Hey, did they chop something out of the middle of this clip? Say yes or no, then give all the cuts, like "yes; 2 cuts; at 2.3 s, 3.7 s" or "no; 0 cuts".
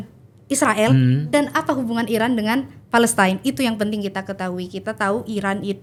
no; 0 cuts